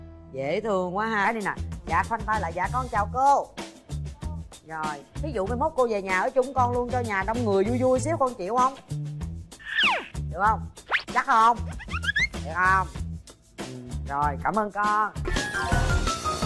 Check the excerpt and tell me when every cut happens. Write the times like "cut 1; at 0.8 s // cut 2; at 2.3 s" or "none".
cut 1; at 1.2 s // cut 2; at 15.2 s